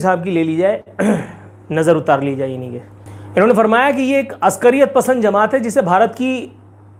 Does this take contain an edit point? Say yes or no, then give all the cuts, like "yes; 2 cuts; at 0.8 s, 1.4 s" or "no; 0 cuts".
no; 0 cuts